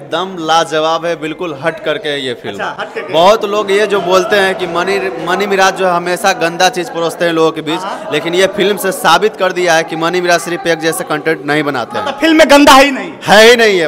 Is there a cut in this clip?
no; 0 cuts

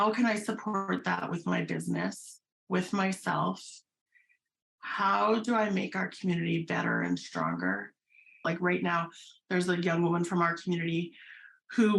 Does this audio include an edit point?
yes; 1 cut; at 8.3 s

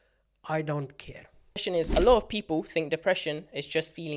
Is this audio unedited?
no; 1 cut; at 1.6 s

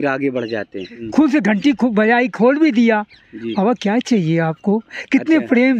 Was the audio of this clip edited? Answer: yes; 1 cut; at 1.0 s

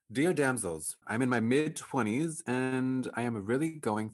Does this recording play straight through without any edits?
no; 1 cut; at 1.0 s

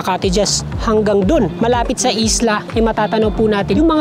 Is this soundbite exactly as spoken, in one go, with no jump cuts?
no; 2 cuts; at 1.5 s, 2.6 s

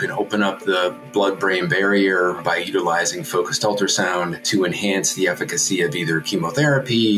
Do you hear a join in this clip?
yes; 2 cuts; at 2.4 s, 4.4 s

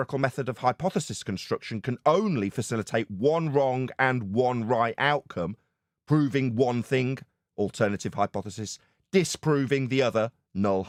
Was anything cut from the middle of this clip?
no; 0 cuts

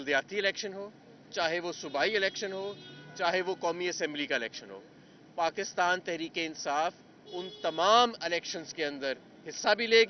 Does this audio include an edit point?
no; 0 cuts

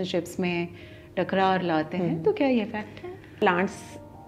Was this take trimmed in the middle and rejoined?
yes; 1 cut; at 3.4 s

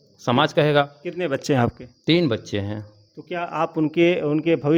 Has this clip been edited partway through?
no; 0 cuts

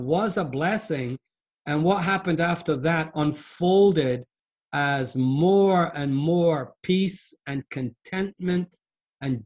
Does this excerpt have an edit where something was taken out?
no; 0 cuts

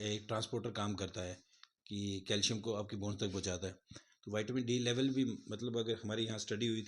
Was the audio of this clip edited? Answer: no; 0 cuts

